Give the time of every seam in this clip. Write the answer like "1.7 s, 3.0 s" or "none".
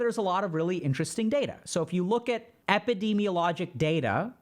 2.5 s